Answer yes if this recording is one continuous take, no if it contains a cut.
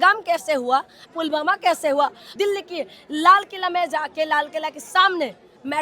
no